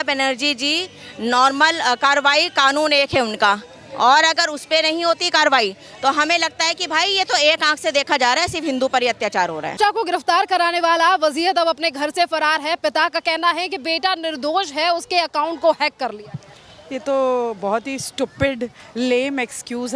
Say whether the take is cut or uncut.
uncut